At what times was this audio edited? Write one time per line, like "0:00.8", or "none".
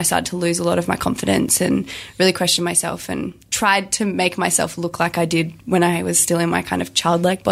none